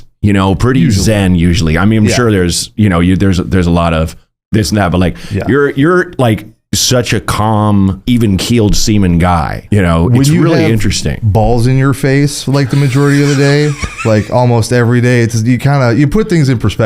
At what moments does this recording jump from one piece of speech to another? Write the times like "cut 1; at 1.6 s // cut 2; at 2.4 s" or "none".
cut 1; at 8.0 s // cut 2; at 9.6 s